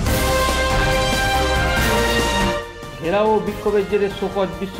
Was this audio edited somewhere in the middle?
no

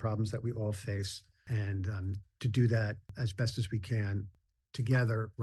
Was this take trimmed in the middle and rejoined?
yes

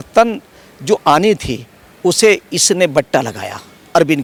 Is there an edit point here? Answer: no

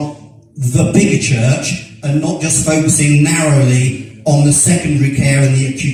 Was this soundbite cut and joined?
no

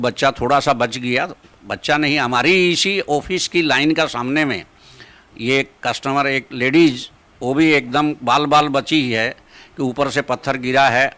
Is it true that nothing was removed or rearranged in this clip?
yes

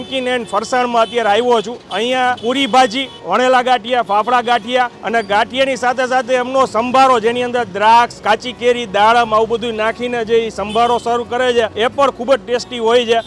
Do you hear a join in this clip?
yes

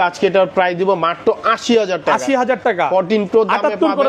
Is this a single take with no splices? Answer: yes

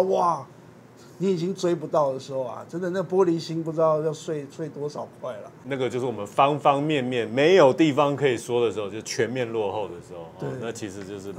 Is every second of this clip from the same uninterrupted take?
no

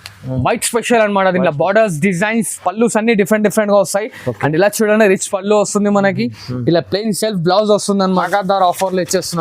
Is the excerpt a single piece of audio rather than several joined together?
no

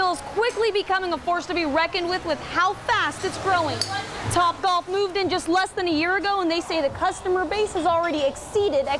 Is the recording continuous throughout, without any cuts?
yes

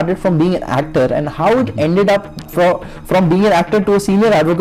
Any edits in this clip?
no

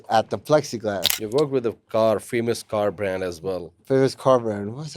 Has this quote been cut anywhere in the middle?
yes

